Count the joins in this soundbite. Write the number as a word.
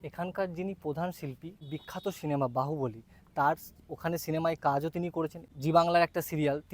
two